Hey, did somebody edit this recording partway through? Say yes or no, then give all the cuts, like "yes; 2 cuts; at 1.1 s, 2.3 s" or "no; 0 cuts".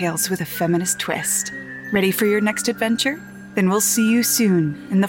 yes; 2 cuts; at 1.3 s, 3.4 s